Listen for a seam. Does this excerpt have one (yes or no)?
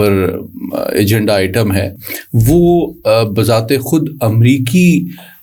no